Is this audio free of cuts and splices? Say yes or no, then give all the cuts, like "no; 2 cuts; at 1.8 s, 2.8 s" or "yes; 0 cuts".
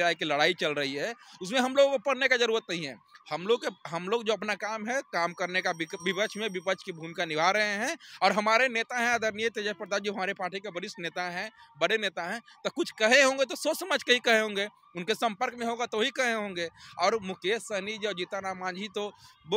yes; 0 cuts